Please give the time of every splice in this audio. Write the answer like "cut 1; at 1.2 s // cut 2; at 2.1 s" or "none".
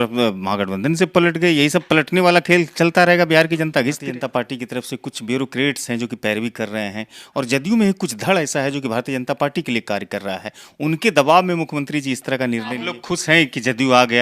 cut 1; at 4.1 s // cut 2; at 12.8 s